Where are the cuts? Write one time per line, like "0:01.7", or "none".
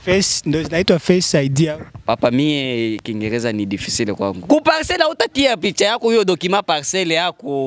0:04.4